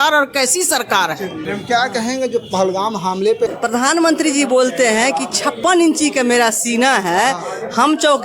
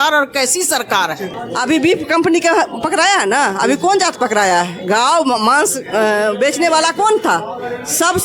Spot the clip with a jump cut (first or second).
second